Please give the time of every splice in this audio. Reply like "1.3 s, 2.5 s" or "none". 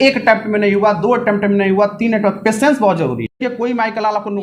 3.4 s